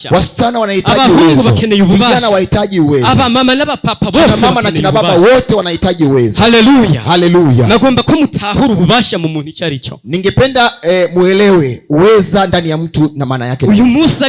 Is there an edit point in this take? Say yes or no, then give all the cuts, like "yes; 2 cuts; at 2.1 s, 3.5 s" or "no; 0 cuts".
no; 0 cuts